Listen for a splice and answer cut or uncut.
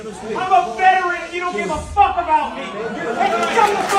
uncut